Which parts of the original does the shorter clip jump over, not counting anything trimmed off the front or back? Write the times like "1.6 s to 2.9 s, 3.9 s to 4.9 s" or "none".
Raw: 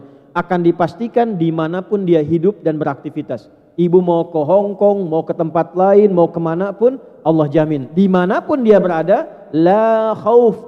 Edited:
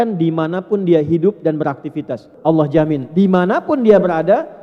3.5 s to 7.1 s